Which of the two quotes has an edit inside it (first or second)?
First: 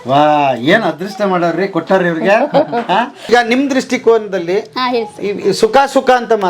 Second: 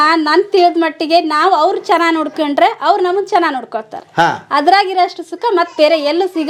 first